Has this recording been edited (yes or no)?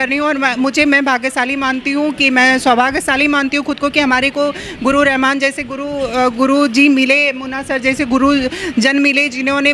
no